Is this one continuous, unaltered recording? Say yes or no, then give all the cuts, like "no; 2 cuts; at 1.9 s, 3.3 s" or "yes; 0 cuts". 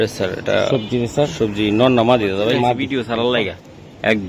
no; 1 cut; at 2.8 s